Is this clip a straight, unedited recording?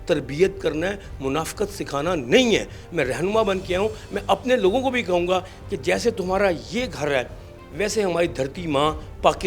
yes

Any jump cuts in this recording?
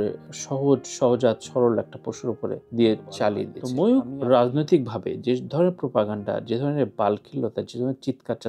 yes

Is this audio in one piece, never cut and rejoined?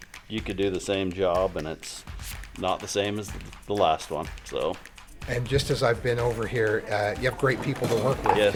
yes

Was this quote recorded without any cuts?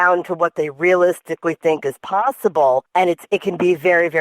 no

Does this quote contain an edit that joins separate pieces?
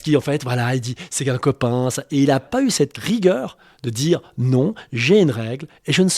yes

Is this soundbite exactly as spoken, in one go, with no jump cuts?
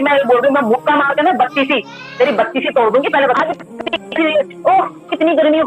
no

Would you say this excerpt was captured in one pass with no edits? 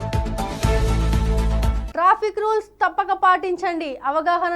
no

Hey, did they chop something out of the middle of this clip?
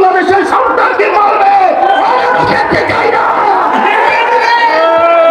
no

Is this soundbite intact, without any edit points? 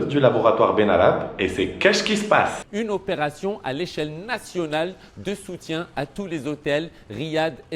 no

